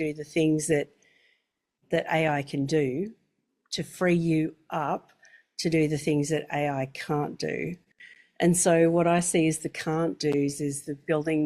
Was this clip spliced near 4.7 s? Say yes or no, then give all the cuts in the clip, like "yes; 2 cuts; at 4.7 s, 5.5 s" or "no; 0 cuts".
no; 0 cuts